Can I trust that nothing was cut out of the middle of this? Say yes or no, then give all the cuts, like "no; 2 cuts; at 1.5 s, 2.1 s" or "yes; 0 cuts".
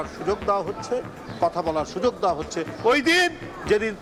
yes; 0 cuts